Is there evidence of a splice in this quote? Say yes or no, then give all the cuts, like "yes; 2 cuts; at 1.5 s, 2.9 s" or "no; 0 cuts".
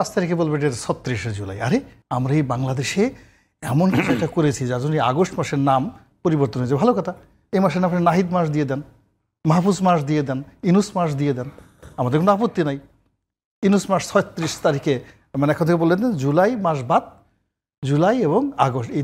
yes; 1 cut; at 2.0 s